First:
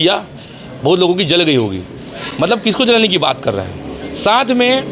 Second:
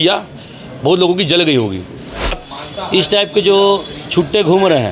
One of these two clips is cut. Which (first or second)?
second